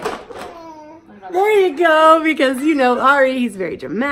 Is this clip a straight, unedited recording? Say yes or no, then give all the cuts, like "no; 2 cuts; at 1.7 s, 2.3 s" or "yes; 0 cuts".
yes; 0 cuts